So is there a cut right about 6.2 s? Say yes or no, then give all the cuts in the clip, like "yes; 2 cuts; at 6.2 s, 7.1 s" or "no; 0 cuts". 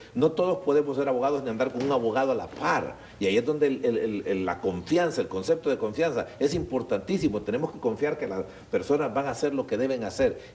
yes; 1 cut; at 6.2 s